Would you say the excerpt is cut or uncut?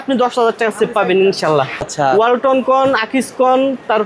cut